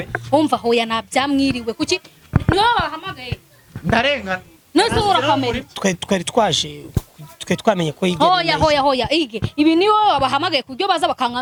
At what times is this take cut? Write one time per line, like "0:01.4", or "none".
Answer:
none